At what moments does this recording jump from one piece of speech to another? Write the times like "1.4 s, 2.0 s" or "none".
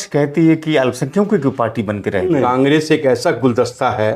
2.4 s